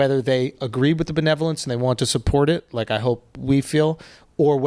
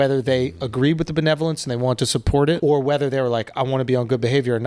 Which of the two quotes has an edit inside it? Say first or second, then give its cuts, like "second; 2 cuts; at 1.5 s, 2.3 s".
second; 1 cut; at 2.6 s